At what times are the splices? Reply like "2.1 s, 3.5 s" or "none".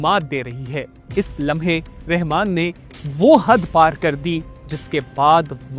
1.0 s